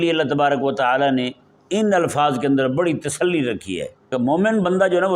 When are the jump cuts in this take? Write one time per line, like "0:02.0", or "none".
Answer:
0:04.1